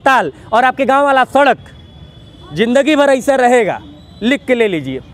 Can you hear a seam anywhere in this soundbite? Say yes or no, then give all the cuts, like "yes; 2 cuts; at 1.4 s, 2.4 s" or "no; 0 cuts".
no; 0 cuts